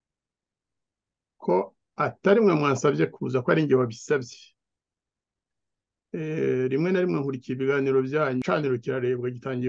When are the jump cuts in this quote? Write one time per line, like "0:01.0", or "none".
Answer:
0:08.4